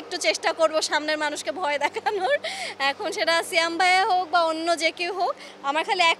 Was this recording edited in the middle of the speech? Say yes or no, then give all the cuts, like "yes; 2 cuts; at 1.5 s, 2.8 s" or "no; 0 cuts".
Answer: no; 0 cuts